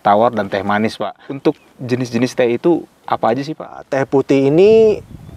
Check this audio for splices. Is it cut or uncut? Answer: cut